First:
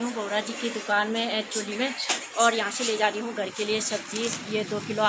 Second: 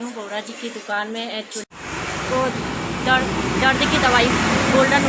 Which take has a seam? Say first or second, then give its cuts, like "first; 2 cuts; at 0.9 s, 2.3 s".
second; 1 cut; at 1.7 s